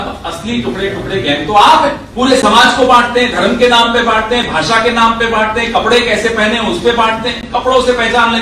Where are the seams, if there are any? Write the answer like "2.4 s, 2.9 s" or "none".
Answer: 2.1 s